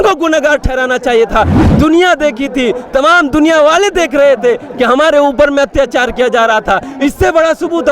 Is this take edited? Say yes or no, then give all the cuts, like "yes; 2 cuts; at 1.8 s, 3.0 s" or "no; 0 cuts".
yes; 1 cut; at 1.6 s